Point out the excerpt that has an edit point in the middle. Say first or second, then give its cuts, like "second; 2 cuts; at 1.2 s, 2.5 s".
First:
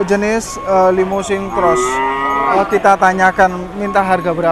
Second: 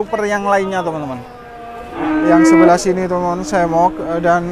second; 1 cut; at 2.0 s